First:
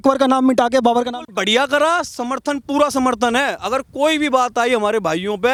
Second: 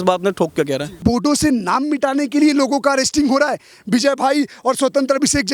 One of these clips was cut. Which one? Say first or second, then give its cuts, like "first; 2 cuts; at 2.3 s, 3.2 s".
second; 1 cut; at 0.9 s